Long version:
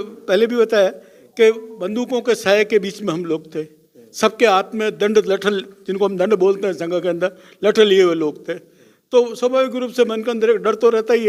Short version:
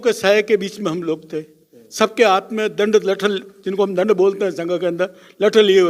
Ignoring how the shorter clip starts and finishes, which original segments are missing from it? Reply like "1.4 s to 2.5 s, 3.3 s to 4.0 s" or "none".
none